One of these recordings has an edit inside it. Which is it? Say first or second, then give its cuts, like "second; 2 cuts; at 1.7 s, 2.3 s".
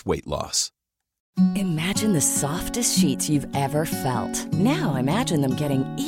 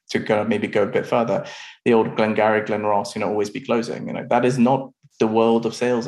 first; 1 cut; at 1.2 s